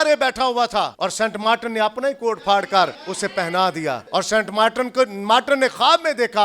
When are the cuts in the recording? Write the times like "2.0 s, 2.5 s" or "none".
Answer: 0.9 s, 3.0 s, 4.0 s